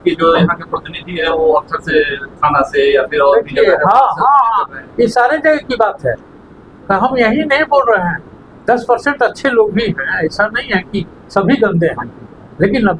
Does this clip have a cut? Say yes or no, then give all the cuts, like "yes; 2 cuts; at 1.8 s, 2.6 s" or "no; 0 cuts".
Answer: no; 0 cuts